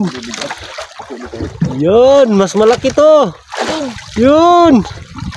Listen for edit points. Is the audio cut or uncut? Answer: uncut